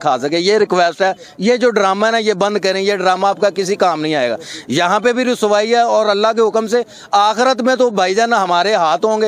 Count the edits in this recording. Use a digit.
0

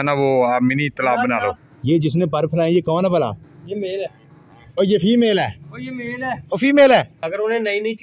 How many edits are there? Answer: 2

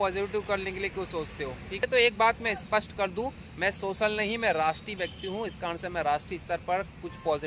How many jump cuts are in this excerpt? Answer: 1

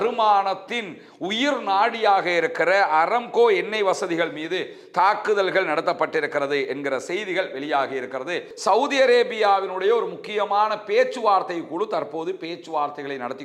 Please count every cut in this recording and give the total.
1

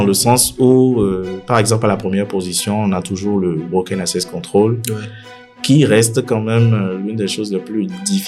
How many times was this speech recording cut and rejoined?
0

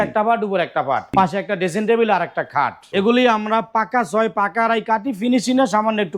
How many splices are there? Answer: 2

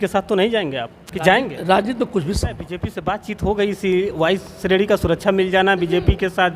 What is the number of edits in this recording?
1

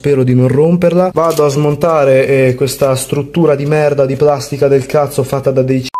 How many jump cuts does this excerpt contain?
1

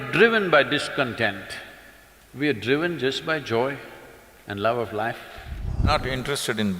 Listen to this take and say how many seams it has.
1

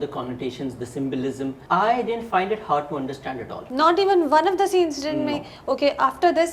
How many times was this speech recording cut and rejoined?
2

